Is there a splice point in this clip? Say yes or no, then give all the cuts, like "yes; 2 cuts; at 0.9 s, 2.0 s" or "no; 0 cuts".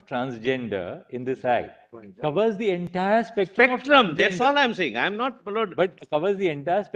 no; 0 cuts